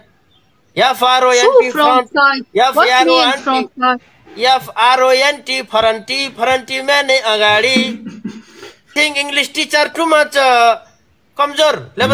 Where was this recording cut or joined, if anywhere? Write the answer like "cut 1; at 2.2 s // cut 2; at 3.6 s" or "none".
cut 1; at 8.9 s